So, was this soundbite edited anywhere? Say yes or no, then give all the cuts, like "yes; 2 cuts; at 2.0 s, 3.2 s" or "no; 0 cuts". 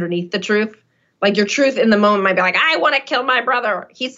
no; 0 cuts